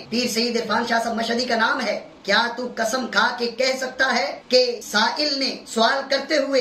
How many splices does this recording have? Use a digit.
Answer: 0